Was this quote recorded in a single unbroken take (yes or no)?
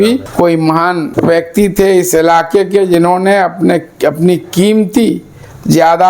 yes